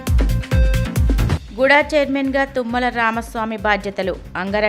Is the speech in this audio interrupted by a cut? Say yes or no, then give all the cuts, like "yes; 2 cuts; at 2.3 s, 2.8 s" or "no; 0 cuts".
yes; 1 cut; at 1.1 s